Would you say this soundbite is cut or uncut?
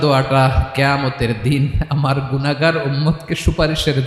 uncut